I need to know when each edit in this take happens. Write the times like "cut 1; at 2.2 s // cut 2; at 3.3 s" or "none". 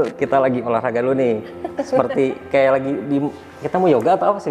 none